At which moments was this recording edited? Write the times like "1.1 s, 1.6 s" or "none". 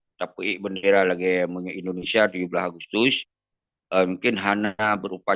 none

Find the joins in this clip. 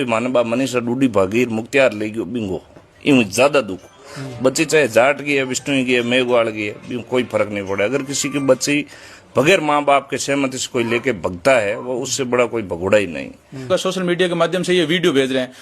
13.7 s

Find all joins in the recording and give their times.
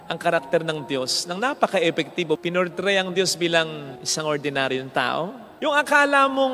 2.4 s, 5.5 s

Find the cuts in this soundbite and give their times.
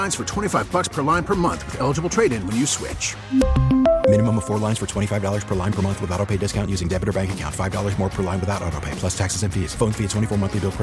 none

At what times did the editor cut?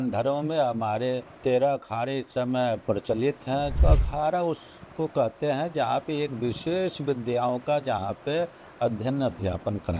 1.3 s, 3.7 s

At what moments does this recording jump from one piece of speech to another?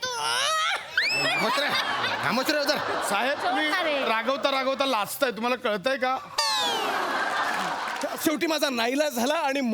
8.1 s

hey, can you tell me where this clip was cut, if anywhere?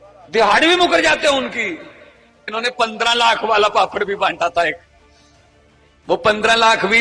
2.5 s

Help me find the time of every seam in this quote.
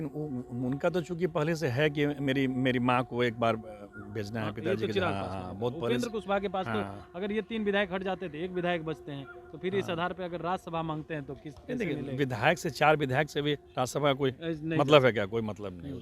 none

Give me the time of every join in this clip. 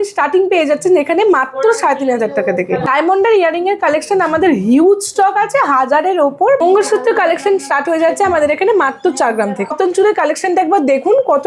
2.8 s, 6.6 s, 9.7 s

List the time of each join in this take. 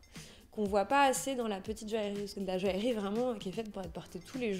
2.3 s

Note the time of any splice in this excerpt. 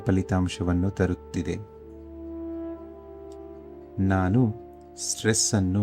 1.7 s, 3.4 s

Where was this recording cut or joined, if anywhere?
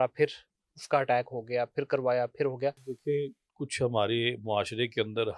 2.9 s

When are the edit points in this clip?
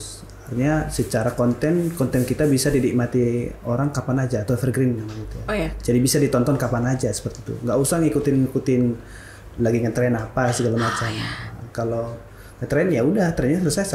none

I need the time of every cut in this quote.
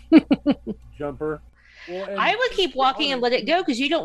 1.5 s

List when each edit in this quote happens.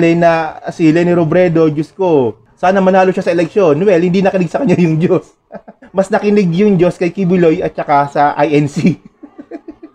none

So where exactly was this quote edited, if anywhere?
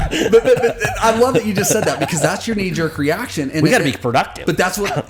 none

